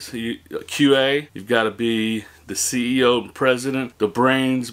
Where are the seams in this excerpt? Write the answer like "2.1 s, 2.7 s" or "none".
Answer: 1.3 s, 3.9 s